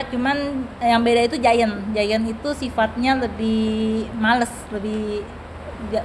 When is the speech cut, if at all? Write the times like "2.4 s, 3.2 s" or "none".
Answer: none